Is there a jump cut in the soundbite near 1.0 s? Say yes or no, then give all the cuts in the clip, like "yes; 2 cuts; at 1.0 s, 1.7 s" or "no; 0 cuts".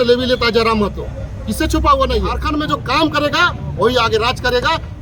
no; 1 cut; at 2.4 s